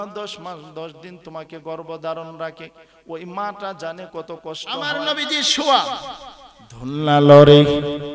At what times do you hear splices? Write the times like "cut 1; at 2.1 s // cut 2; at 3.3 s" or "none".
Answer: cut 1; at 5.0 s